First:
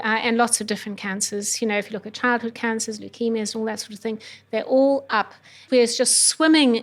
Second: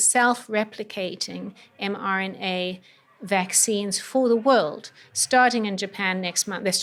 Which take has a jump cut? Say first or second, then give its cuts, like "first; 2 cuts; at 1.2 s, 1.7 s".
first; 1 cut; at 5.6 s